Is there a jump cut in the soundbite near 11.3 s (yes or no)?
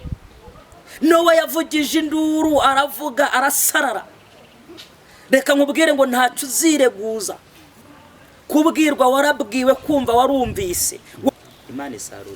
yes